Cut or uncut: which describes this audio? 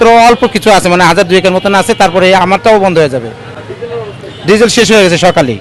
uncut